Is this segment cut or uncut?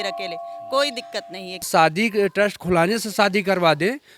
cut